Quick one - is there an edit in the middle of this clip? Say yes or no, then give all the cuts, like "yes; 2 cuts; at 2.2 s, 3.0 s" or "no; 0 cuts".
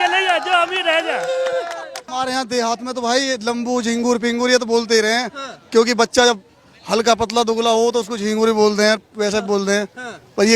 yes; 1 cut; at 2.0 s